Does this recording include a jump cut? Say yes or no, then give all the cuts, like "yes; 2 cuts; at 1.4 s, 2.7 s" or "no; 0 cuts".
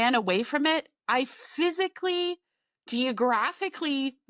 no; 0 cuts